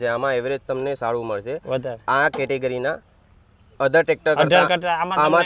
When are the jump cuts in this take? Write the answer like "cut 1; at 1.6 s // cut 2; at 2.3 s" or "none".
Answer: none